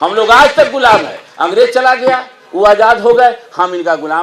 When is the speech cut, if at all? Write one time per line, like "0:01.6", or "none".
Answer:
none